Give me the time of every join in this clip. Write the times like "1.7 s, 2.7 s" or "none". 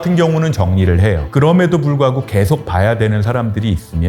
1.2 s

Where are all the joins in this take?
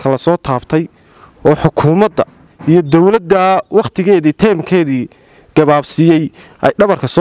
none

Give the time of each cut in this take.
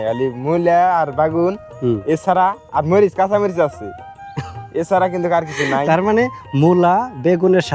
none

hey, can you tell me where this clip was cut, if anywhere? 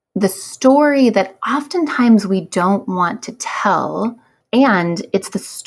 4.3 s

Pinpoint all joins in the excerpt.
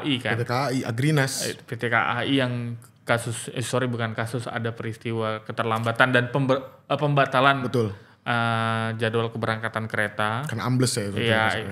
none

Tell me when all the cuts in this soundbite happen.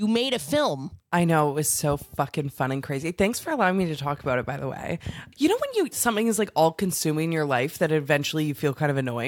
0.9 s, 5.2 s

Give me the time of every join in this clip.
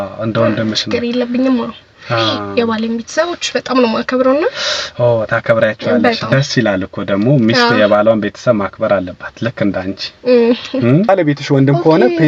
11.1 s

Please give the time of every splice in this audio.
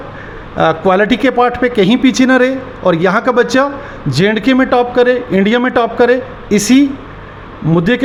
none

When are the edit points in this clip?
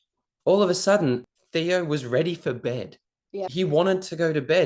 1.2 s, 3.5 s

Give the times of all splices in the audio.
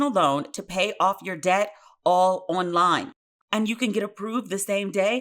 3.3 s

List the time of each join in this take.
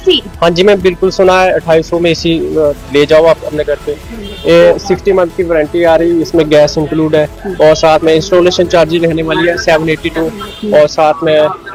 none

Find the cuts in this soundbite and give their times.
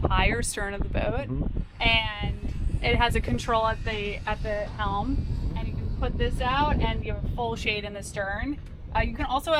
none

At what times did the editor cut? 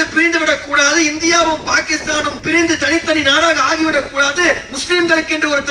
2.4 s

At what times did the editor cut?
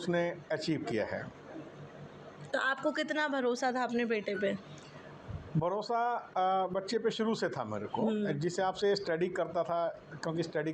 none

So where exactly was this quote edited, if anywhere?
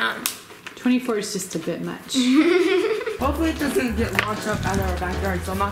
3.2 s

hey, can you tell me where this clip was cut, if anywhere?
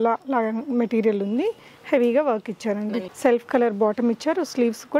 3.1 s

